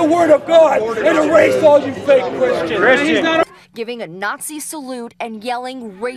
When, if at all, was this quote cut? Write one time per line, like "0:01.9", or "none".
none